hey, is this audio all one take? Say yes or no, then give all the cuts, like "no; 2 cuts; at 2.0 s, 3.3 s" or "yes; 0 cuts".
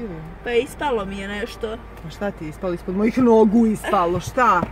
yes; 0 cuts